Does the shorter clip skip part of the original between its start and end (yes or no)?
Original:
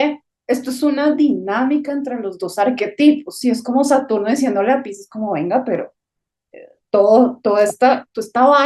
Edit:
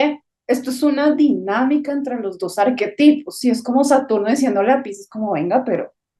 no